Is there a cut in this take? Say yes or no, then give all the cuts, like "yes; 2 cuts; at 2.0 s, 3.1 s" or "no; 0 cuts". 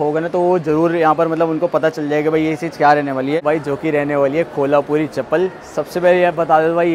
yes; 1 cut; at 3.4 s